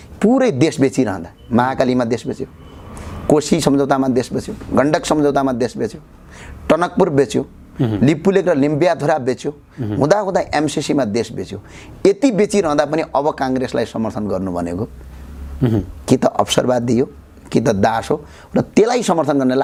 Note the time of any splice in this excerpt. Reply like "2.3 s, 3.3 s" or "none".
none